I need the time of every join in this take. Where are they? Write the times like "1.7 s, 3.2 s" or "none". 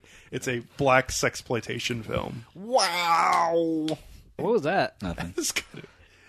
4.2 s